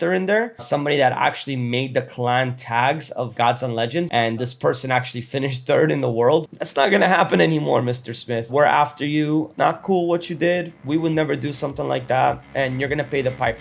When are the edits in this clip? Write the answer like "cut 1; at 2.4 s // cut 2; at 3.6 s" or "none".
cut 1; at 4.1 s // cut 2; at 6.5 s